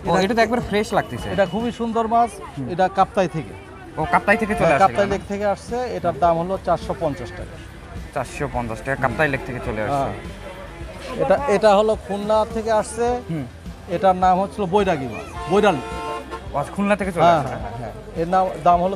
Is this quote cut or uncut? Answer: uncut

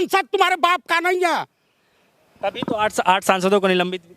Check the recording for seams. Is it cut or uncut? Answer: uncut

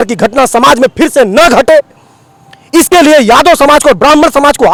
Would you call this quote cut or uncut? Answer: uncut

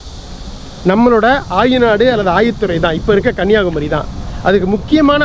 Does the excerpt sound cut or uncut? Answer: uncut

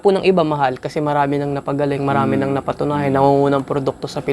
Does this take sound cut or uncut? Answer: uncut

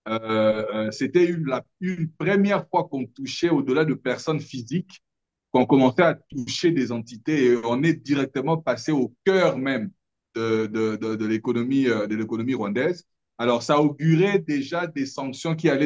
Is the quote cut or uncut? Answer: uncut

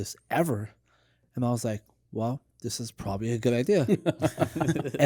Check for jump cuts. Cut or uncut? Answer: uncut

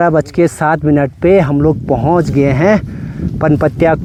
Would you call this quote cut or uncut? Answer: uncut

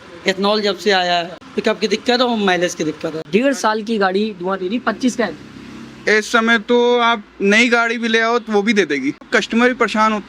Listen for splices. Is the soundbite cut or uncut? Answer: cut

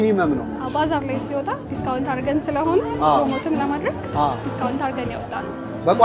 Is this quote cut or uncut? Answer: uncut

